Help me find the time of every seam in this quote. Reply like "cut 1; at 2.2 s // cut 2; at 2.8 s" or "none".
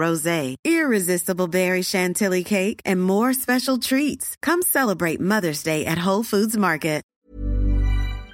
cut 1; at 7.1 s

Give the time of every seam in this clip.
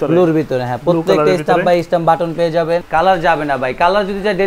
cut 1; at 2.8 s

